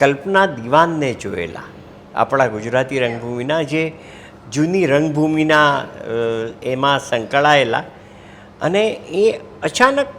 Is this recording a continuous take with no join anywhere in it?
yes; 0 cuts

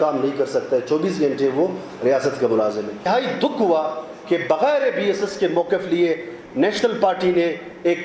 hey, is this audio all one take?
no; 1 cut; at 3.1 s

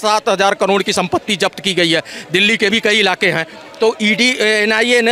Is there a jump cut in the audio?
no; 0 cuts

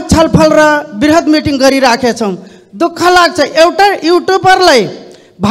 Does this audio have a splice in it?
no; 0 cuts

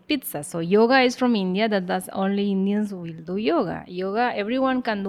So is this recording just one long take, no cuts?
yes; 0 cuts

